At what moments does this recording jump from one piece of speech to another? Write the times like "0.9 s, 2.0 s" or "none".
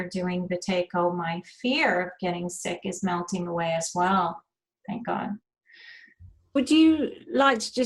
none